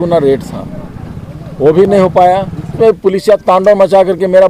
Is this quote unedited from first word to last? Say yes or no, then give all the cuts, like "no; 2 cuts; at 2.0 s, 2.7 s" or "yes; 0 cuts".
no; 1 cut; at 2.7 s